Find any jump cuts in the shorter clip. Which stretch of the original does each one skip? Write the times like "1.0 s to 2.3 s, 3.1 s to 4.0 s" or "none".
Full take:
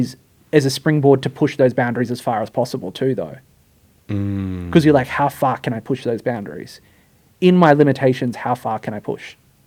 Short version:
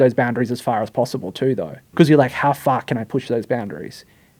3.4 s to 4.6 s